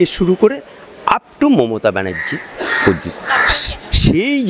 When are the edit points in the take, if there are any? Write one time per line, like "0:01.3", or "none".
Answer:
none